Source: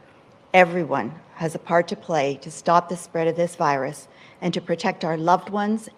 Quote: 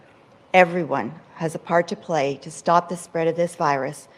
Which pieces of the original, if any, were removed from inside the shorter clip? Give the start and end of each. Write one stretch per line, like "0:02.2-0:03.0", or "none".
none